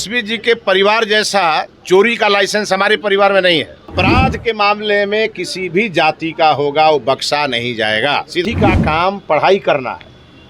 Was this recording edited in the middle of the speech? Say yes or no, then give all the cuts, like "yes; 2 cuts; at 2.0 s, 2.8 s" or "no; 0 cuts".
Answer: yes; 2 cuts; at 3.9 s, 8.4 s